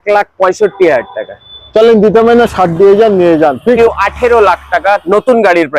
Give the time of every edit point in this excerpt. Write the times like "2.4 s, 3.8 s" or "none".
3.8 s